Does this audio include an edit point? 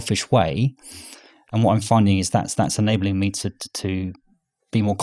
no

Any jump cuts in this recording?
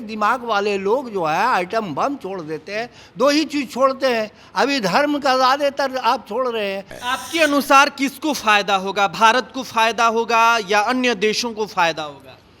yes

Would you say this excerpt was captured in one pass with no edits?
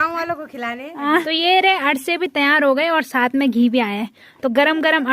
no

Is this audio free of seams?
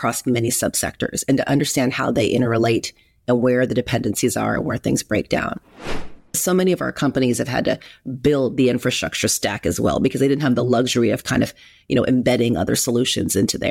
no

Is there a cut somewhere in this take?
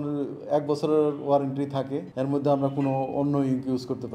no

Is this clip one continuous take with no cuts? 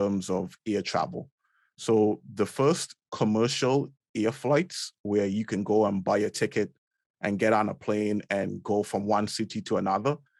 yes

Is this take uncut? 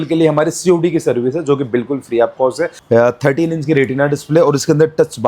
no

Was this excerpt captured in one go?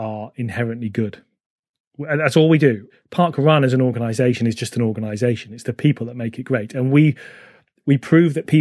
no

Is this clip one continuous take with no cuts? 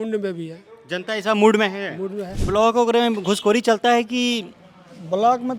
no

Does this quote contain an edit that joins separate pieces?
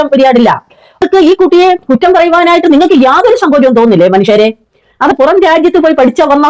yes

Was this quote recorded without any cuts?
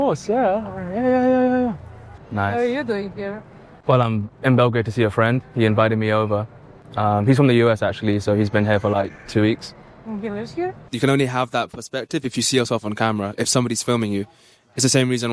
no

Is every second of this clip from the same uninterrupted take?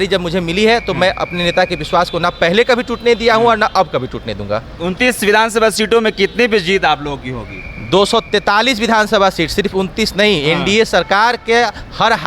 yes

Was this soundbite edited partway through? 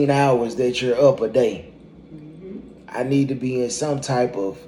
no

